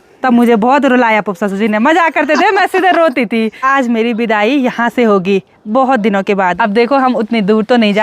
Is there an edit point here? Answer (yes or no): yes